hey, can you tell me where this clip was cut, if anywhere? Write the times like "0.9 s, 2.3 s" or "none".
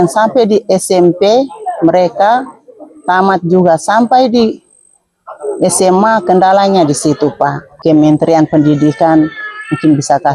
7.7 s